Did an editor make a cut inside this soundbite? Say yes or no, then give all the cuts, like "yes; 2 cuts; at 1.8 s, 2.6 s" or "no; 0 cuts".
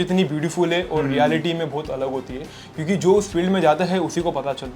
no; 0 cuts